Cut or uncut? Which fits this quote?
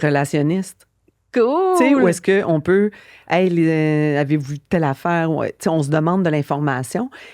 uncut